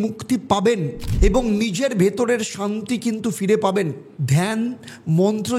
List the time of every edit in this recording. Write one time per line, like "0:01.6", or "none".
none